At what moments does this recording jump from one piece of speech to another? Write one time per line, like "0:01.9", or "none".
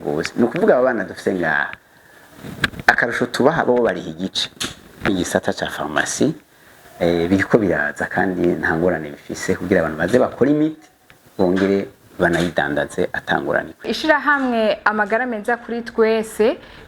0:05.1
0:13.9

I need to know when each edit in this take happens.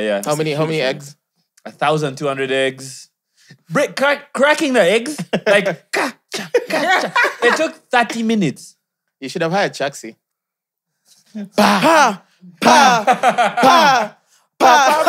none

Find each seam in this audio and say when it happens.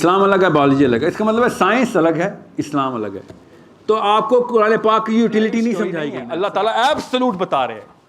0:06.2

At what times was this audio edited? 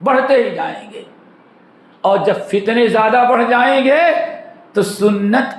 none

